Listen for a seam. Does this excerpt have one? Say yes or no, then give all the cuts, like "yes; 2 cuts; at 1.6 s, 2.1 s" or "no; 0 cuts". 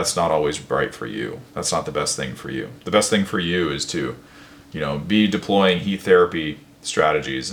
no; 0 cuts